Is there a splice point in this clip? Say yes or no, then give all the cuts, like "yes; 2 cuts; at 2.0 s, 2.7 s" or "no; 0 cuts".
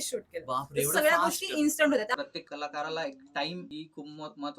yes; 2 cuts; at 2.1 s, 3.7 s